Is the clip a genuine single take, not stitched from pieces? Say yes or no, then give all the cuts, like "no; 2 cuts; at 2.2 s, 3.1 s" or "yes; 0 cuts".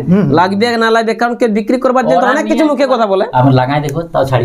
no; 1 cut; at 3.3 s